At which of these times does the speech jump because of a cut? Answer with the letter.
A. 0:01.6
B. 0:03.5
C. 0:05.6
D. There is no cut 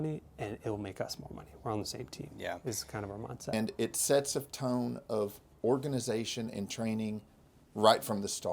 B